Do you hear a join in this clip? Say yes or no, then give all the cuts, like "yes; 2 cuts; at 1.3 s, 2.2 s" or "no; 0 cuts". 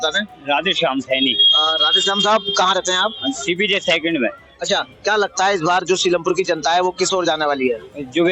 no; 0 cuts